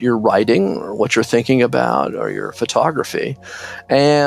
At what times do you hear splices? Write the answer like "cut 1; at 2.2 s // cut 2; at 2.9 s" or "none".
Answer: none